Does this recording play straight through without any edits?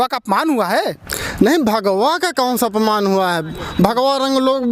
yes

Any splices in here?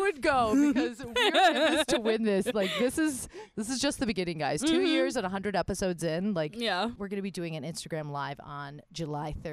yes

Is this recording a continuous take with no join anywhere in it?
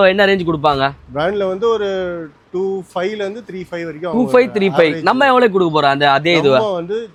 yes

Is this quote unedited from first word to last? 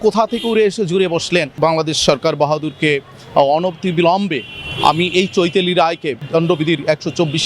no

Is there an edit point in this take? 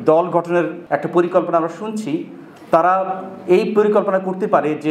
no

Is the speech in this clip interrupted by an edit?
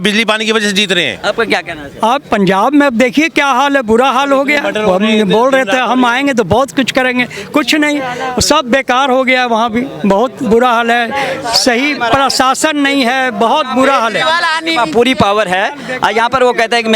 no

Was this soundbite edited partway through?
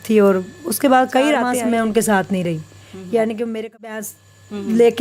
yes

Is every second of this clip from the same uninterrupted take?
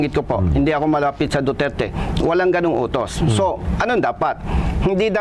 yes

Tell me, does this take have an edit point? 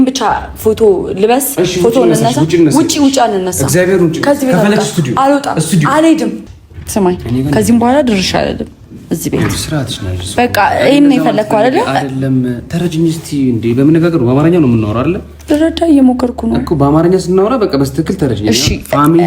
yes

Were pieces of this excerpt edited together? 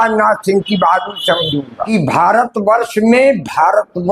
yes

